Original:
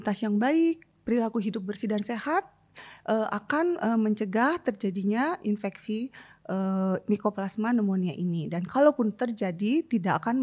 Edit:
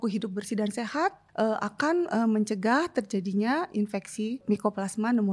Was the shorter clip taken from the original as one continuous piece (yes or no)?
no